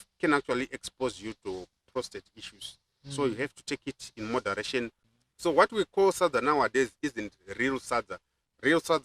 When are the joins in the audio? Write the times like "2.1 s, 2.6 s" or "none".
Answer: 5.1 s

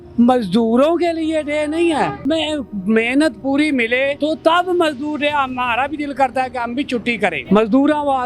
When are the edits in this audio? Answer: 2.2 s, 4.2 s, 7.4 s

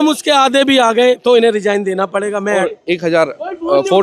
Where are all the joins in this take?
2.6 s

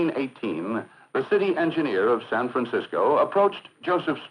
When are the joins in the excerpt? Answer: 1.6 s

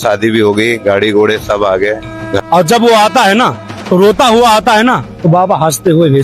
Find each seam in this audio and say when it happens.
2.3 s

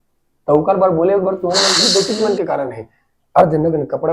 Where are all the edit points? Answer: 1.8 s

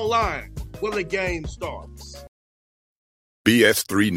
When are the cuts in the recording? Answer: 2.2 s

